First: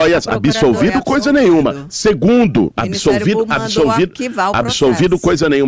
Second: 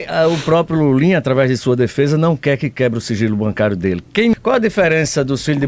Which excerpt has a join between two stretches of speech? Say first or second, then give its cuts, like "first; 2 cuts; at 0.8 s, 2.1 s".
second; 1 cut; at 4.3 s